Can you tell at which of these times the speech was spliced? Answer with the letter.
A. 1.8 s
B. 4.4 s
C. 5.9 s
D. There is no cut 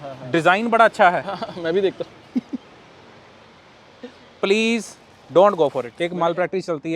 C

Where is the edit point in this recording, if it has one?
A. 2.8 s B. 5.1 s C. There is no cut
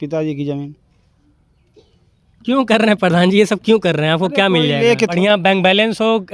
B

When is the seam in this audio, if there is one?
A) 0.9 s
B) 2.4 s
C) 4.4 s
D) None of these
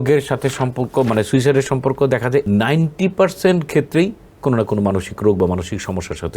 B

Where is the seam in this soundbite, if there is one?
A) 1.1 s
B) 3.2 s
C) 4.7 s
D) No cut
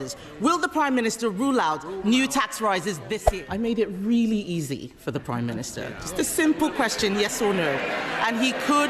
B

